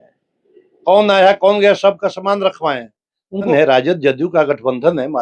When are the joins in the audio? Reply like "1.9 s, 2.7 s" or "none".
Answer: 3.5 s